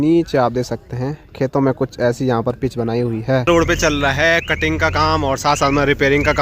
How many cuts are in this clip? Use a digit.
1